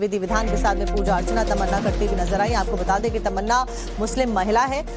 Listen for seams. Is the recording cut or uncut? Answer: cut